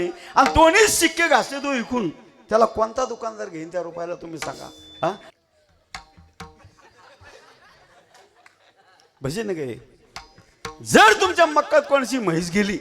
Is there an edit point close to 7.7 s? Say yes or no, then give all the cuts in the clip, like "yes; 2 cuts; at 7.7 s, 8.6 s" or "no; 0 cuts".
no; 1 cut; at 5.3 s